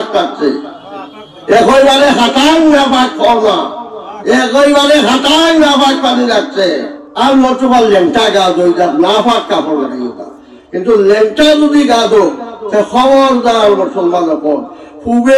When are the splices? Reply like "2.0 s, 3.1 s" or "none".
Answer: 7.0 s